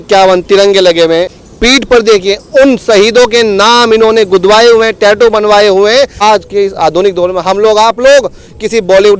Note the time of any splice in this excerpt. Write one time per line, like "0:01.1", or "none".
0:01.3
0:06.2